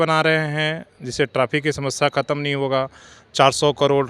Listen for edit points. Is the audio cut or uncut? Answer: uncut